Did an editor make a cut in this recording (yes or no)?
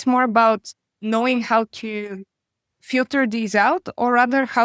no